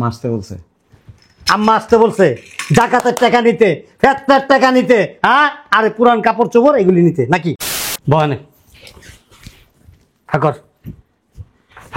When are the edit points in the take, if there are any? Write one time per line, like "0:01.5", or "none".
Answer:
0:07.6